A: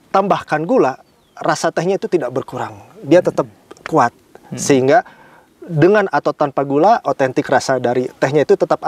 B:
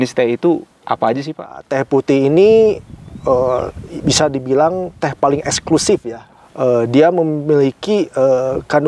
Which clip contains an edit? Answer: B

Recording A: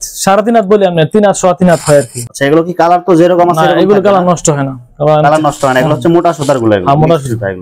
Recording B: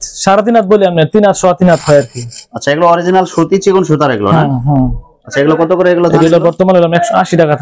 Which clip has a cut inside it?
A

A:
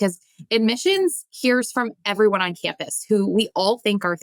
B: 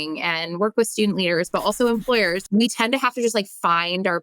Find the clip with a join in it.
B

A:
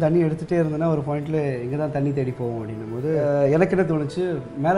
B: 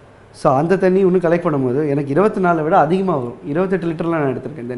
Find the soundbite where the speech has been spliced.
A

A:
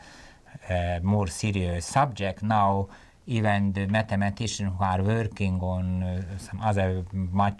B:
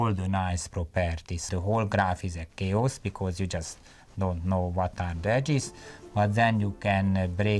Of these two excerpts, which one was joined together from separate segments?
B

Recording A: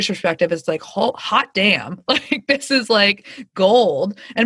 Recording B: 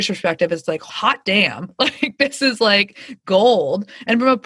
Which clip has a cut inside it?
B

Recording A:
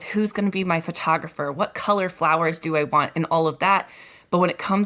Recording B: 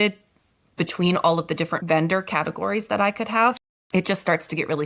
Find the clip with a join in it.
B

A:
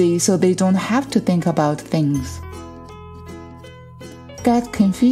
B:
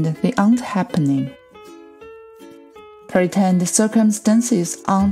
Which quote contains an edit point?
A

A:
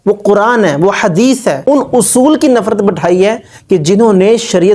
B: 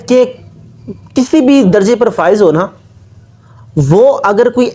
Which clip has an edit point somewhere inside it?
A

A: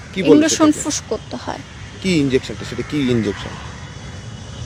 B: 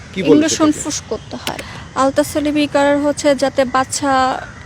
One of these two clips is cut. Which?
B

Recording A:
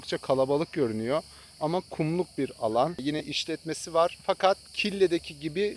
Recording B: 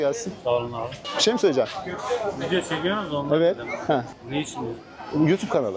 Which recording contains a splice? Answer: A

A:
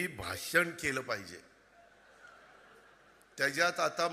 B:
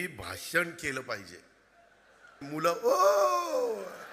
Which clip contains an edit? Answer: B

